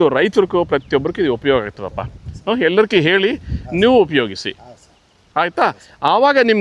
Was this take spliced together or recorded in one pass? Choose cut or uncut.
uncut